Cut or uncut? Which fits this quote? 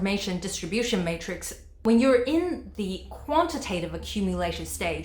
uncut